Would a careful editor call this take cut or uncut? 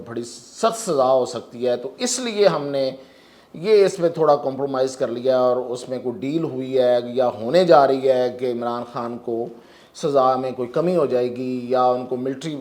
uncut